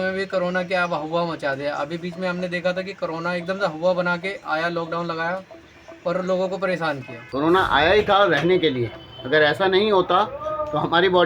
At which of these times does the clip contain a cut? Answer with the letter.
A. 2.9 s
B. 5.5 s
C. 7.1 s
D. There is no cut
C